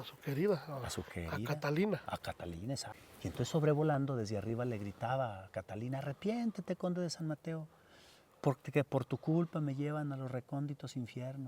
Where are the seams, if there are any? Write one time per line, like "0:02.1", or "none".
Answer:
0:02.9